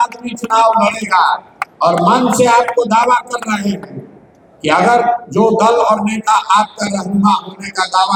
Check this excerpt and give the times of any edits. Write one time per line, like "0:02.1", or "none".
none